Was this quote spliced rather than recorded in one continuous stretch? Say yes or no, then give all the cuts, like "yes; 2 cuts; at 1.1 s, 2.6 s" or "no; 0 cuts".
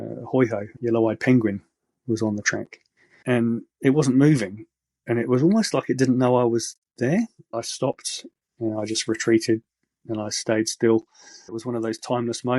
yes; 2 cuts; at 7.5 s, 11.4 s